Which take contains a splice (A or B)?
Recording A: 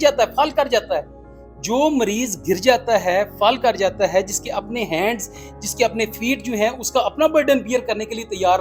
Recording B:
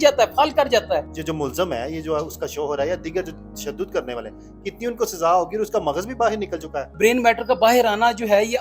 B